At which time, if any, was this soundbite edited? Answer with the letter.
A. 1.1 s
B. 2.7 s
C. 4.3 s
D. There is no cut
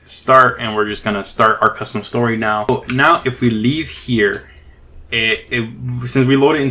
B